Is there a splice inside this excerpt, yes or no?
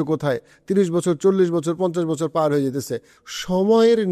yes